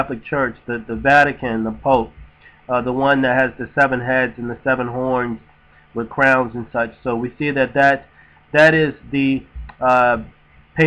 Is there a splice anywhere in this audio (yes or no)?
yes